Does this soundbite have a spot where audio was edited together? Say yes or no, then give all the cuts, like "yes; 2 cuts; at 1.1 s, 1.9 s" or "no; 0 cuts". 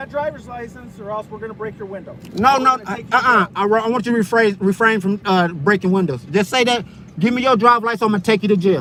no; 0 cuts